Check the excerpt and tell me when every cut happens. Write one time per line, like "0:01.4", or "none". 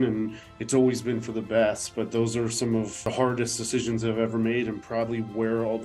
0:03.0

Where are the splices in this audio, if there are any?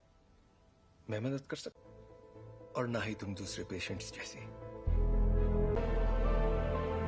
0:05.8

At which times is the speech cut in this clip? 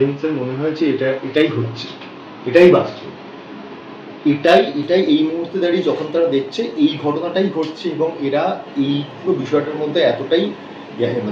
none

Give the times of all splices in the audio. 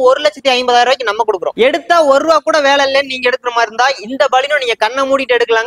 0:01.5

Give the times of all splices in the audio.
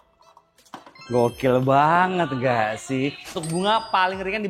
0:03.4

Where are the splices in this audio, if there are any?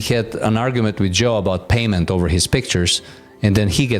none

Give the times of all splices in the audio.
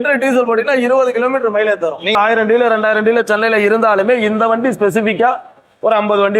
0:02.1

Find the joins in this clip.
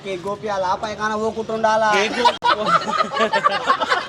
0:03.1

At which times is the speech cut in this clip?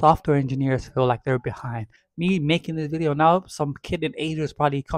0:02.0

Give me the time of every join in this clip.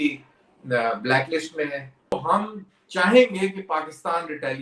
0:02.1

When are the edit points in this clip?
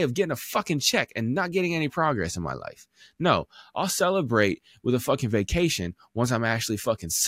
none

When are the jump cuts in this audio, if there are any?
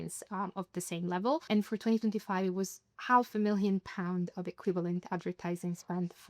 0:01.5

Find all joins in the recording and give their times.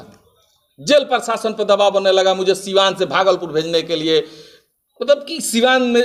none

